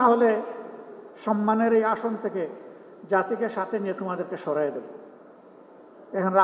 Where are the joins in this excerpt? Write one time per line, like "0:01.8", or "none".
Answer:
none